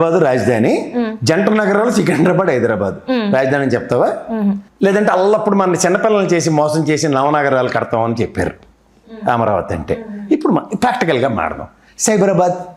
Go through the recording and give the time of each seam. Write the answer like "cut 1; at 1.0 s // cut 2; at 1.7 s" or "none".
none